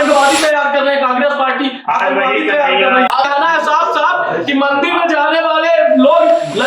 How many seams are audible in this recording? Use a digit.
1